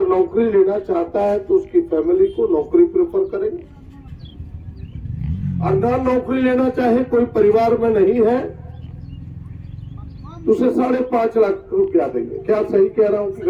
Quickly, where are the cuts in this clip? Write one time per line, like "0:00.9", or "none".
none